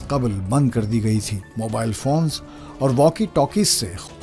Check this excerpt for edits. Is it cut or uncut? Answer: cut